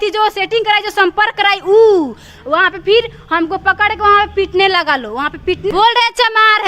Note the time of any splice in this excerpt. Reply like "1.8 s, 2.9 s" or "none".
5.7 s